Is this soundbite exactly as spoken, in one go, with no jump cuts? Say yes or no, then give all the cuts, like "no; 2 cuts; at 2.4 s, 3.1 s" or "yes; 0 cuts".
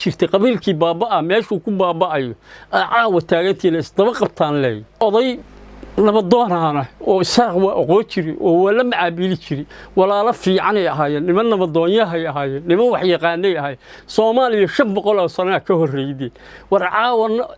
no; 1 cut; at 5.0 s